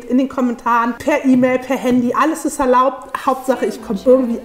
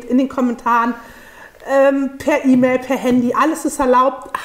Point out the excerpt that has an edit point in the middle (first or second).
first